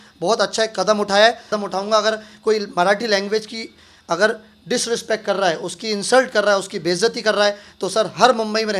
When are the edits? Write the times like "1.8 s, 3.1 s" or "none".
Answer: 1.5 s